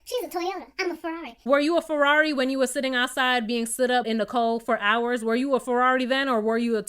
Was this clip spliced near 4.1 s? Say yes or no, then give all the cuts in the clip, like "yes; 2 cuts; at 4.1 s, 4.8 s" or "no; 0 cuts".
yes; 2 cuts; at 1.4 s, 4.1 s